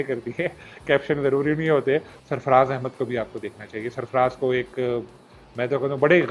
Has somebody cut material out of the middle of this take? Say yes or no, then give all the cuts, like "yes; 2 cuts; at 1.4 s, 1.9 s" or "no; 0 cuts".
yes; 1 cut; at 2.2 s